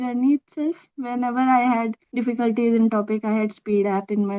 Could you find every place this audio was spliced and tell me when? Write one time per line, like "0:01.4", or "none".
0:02.0